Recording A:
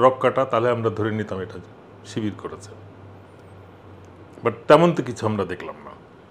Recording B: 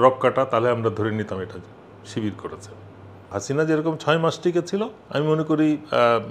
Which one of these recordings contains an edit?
B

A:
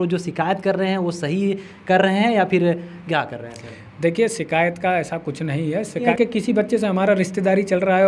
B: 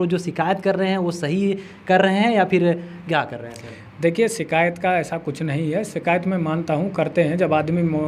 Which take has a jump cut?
A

